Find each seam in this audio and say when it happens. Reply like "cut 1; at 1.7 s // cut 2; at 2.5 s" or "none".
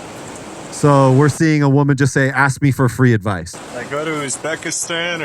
cut 1; at 3.5 s